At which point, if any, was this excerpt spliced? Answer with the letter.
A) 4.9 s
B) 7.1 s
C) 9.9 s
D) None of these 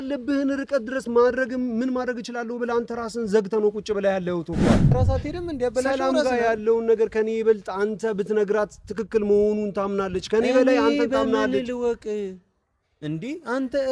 A